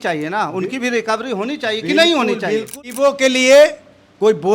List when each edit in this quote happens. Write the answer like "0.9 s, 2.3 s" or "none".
2.9 s